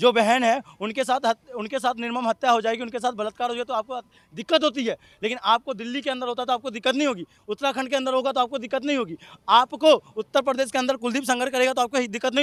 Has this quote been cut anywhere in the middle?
no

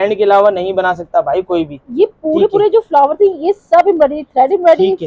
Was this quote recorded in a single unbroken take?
yes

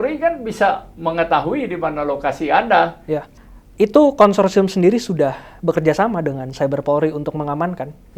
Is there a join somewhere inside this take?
yes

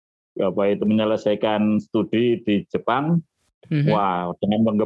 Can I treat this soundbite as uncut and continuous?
yes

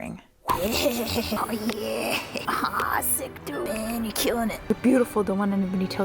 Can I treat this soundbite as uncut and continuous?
no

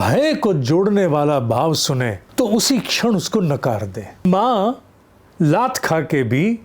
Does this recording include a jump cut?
yes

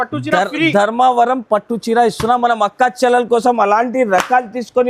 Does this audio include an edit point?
no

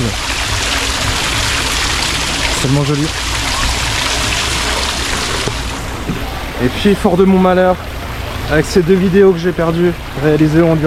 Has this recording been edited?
no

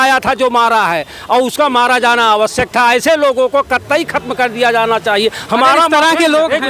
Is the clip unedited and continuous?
yes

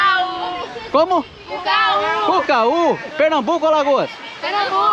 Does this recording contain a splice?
no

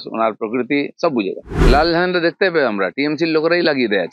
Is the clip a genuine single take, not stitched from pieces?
no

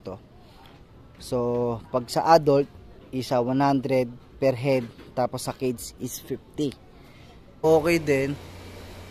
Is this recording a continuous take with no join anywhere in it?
no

